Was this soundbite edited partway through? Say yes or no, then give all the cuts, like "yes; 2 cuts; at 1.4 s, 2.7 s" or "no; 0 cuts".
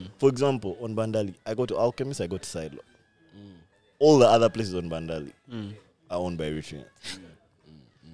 no; 0 cuts